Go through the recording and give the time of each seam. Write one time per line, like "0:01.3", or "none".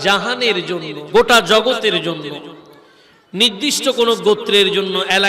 0:01.0